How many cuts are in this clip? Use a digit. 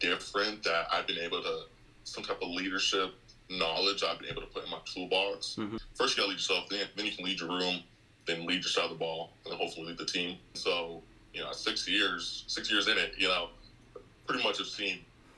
2